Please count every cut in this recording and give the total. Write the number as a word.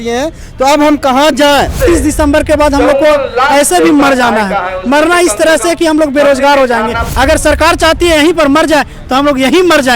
two